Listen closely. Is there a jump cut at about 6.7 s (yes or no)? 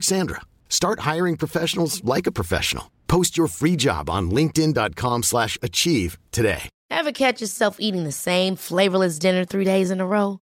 yes